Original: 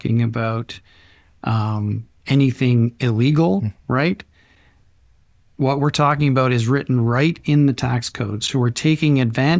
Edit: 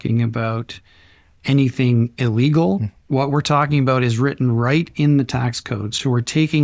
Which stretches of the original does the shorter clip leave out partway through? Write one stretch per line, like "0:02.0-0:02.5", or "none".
0:01.3-0:02.1
0:03.8-0:05.4